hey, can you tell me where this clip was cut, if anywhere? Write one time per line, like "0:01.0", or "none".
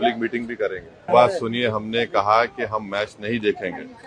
0:01.1